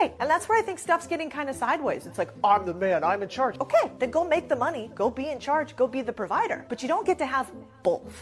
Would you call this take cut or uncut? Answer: cut